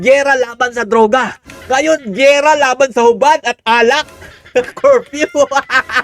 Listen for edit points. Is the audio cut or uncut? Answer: uncut